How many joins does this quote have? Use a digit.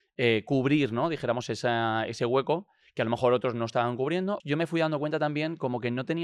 1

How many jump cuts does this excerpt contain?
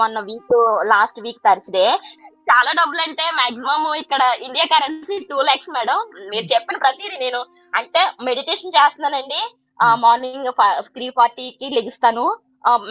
1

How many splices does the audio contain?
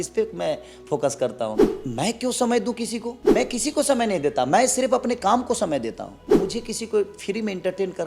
3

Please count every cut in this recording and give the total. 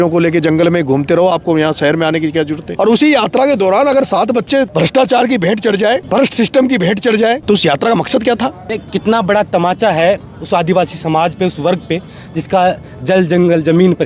5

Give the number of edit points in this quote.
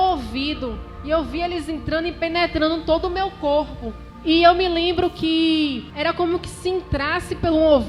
2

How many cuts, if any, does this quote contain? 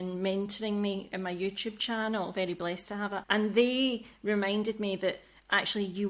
1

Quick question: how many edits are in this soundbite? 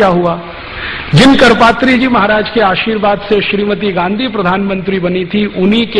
1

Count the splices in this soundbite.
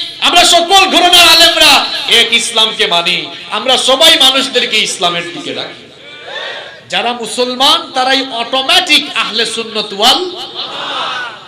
1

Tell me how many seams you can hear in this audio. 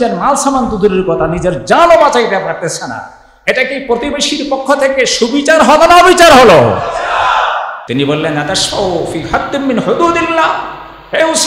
1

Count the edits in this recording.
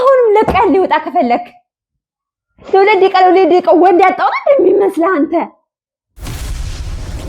1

